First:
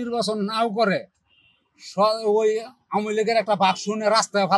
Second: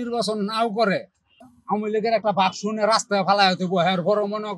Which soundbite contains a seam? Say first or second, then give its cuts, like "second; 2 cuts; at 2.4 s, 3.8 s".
second; 1 cut; at 1.5 s